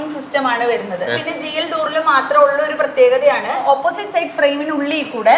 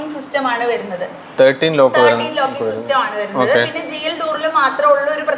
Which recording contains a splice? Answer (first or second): first